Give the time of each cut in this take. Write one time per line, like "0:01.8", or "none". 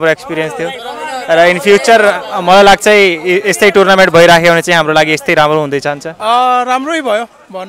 0:06.1